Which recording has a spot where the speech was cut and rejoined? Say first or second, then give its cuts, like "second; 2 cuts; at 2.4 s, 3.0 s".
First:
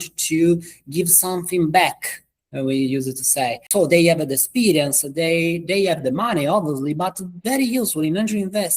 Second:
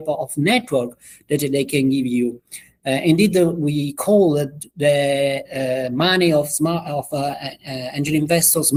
first; 1 cut; at 3.6 s